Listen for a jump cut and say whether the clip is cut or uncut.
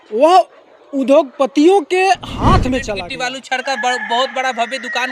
cut